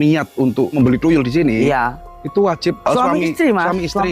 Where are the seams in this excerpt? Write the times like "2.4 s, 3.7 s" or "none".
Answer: 0.7 s, 2.8 s